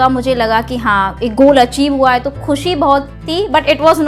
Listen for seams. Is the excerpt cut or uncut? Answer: uncut